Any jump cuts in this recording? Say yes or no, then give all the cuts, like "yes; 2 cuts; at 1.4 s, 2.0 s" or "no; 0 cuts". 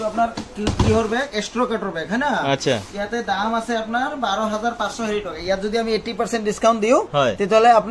no; 0 cuts